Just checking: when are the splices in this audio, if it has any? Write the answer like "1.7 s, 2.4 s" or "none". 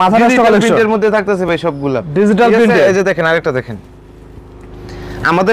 none